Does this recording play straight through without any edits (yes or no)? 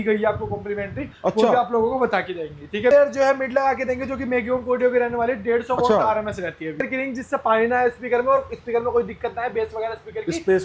no